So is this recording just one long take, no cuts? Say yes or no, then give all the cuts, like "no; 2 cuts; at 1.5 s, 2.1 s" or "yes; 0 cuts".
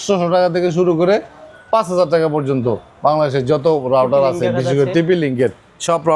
yes; 0 cuts